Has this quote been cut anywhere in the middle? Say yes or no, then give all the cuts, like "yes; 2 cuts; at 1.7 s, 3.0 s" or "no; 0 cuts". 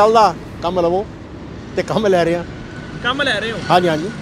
no; 0 cuts